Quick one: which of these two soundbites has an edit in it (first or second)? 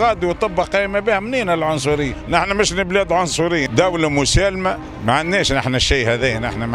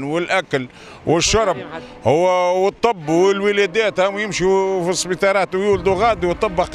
first